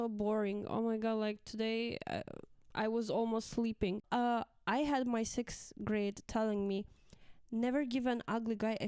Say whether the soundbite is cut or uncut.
cut